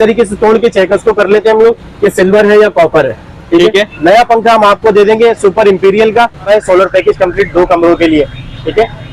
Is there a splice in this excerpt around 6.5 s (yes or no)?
yes